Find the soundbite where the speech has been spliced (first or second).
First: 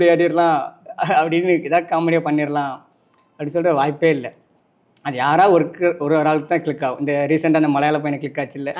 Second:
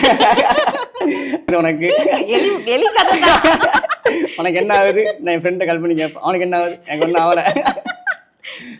second